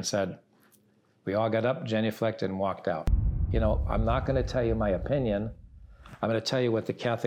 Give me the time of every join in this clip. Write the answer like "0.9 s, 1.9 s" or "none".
3.4 s

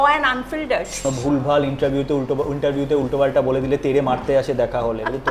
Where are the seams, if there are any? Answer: 1.0 s

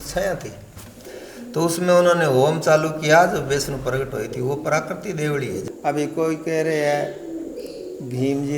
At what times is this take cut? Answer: 5.6 s

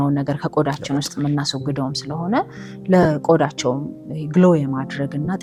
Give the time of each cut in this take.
none

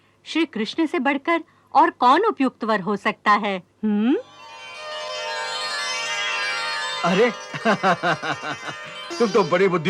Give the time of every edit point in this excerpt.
none

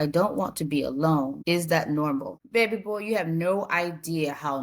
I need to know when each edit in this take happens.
1.4 s, 2.4 s

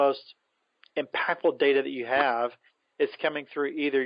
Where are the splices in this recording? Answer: none

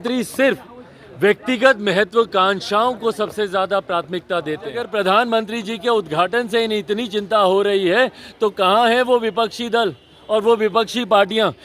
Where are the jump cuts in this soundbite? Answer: 4.8 s

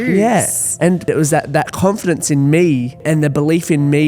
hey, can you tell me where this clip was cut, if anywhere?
1.0 s, 3.0 s

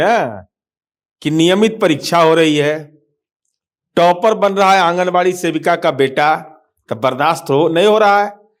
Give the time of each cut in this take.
none

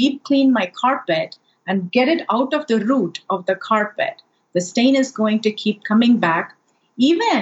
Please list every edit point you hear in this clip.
1.8 s

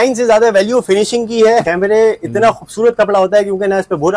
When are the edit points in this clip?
1.6 s

